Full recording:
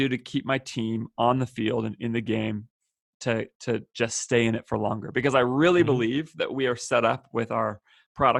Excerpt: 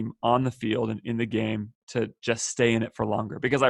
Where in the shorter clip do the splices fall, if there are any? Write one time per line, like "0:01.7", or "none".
0:01.8